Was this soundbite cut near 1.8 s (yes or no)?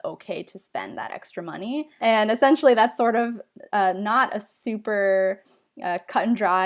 yes